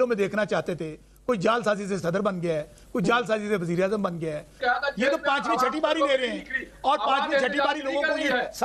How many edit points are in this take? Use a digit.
1